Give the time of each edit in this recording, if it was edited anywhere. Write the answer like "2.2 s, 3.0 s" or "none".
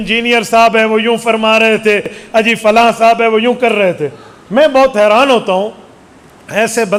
none